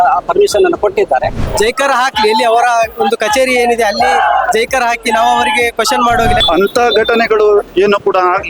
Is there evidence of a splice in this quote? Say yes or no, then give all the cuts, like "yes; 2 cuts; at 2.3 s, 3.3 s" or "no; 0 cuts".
yes; 2 cuts; at 1.4 s, 6.4 s